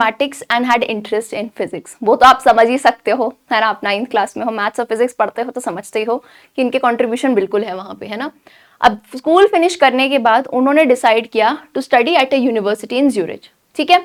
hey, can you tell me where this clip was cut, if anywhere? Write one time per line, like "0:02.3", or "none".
none